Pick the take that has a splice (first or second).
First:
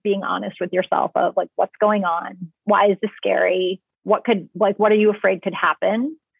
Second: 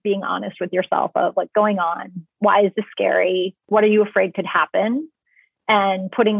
second